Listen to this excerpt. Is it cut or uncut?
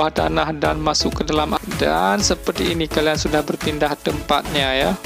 cut